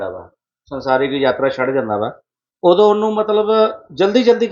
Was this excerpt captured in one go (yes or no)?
yes